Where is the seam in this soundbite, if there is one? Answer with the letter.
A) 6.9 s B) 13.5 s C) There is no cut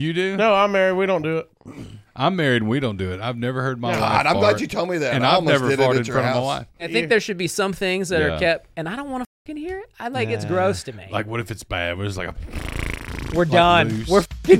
A